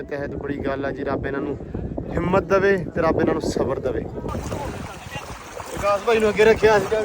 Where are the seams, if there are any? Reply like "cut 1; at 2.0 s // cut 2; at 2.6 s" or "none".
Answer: cut 1; at 4.5 s